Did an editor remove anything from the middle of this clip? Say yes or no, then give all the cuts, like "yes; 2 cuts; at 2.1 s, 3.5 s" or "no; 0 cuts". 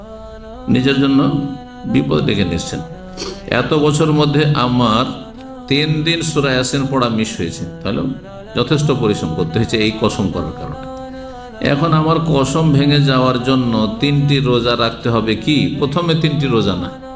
no; 0 cuts